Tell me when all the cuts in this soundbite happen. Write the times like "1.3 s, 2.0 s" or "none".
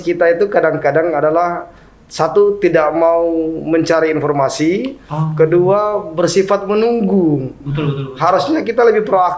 none